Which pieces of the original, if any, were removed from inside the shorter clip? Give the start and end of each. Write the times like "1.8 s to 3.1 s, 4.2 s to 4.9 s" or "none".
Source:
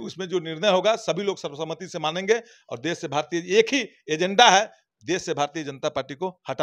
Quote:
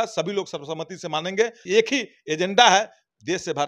2.5 s to 3.4 s